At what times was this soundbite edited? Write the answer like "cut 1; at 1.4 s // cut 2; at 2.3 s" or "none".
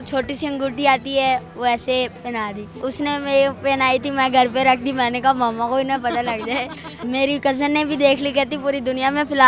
cut 1; at 2.8 s // cut 2; at 7.0 s